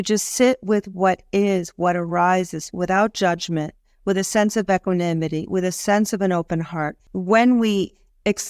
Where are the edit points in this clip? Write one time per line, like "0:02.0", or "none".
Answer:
0:07.0